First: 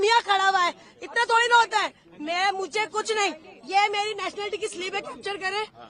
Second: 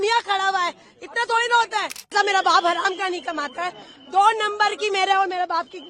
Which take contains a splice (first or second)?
second